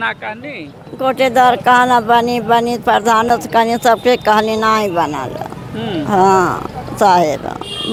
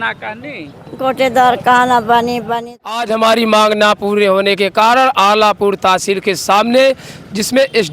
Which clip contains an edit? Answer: second; 1 cut; at 2.7 s

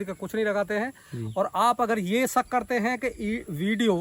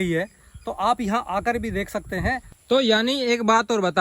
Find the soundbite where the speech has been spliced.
second; 1 cut; at 2.5 s

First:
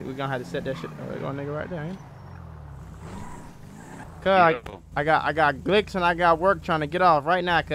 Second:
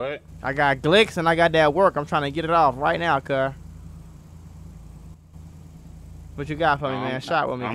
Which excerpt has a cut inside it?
first; 1 cut; at 4.0 s

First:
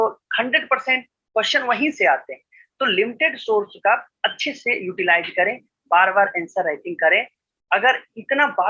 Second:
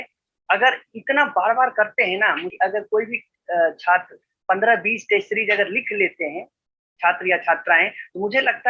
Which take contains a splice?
second; 1 cut; at 2.5 s

